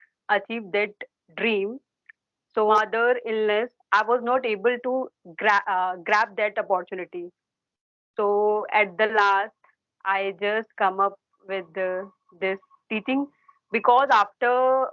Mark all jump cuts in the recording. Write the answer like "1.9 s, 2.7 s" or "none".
2.7 s